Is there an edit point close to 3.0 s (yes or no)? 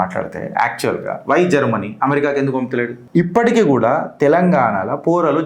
yes